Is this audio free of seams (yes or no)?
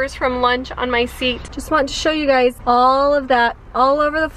no